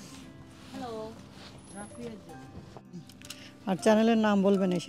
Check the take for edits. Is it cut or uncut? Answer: cut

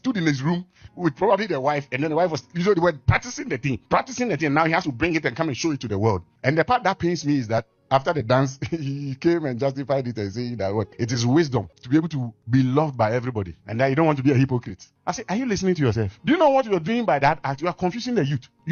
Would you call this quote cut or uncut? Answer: uncut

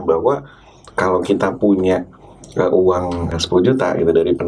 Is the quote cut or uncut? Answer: cut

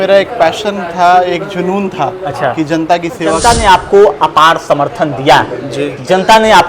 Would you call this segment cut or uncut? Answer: cut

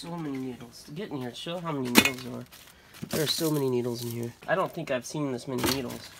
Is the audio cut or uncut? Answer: cut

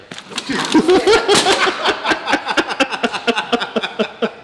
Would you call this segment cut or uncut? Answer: uncut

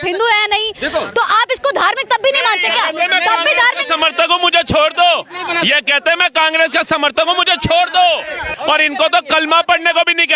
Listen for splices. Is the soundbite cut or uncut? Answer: cut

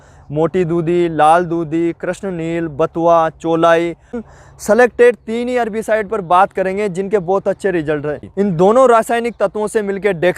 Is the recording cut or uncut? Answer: cut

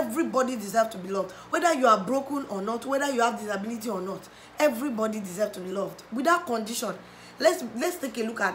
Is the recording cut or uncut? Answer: uncut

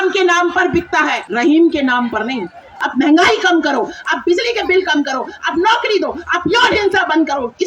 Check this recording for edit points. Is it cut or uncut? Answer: cut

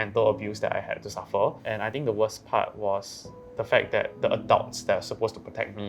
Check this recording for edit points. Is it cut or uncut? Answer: cut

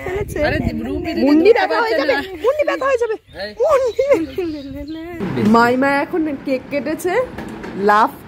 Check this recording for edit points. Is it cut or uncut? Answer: cut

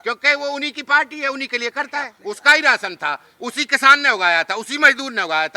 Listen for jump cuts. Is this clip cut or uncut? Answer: cut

